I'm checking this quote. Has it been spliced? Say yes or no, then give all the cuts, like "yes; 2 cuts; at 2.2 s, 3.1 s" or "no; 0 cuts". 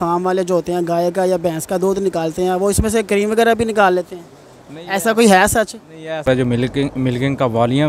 yes; 1 cut; at 6.3 s